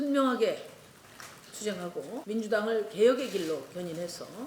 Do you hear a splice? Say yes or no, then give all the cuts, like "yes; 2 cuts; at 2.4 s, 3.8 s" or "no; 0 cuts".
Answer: yes; 1 cut; at 2.1 s